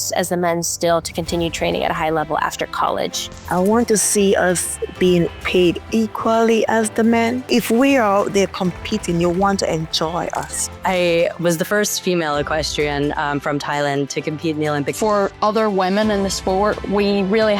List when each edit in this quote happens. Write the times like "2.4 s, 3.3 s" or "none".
3.3 s, 10.7 s, 15.0 s